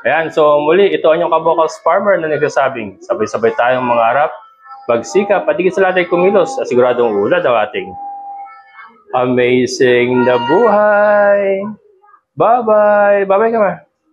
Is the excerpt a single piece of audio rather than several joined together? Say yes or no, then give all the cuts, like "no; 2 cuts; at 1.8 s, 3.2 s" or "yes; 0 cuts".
yes; 0 cuts